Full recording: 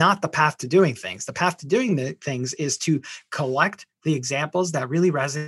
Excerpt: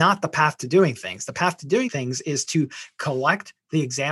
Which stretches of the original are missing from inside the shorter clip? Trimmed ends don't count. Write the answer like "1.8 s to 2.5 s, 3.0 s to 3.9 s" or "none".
1.9 s to 2.2 s